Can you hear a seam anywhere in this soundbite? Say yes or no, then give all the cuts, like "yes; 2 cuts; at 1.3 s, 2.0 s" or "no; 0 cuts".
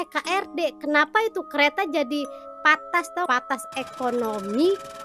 yes; 1 cut; at 3.3 s